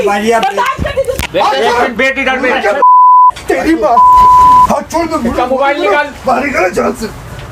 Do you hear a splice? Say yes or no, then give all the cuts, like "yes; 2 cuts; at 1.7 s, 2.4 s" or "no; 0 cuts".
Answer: yes; 1 cut; at 1.2 s